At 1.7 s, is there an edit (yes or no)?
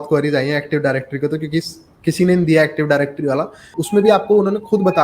no